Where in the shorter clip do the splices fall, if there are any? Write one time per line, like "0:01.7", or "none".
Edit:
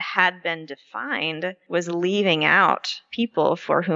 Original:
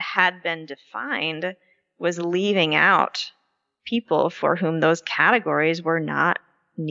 0:01.6
0:03.0